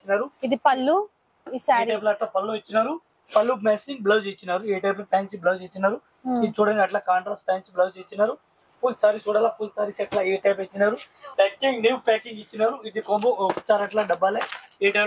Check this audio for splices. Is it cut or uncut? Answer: uncut